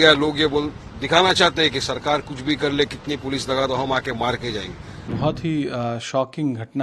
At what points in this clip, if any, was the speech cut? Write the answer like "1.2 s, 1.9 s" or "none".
5.1 s